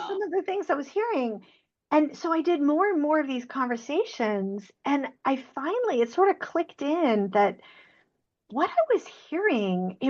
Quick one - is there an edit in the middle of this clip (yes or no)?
no